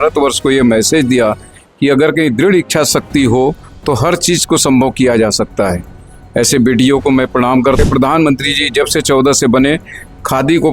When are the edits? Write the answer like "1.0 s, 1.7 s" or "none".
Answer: 7.8 s